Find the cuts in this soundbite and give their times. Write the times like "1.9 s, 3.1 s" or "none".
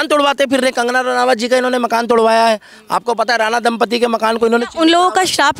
none